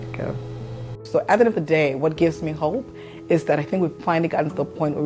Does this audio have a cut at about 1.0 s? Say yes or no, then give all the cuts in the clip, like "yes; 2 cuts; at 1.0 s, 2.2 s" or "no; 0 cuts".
yes; 1 cut; at 1.0 s